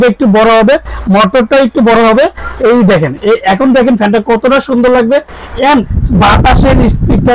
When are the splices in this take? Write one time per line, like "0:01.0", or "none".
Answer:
none